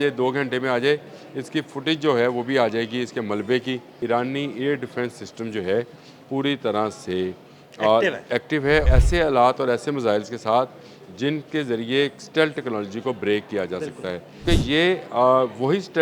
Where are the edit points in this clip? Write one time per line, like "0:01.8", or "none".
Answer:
0:03.9
0:08.9
0:14.4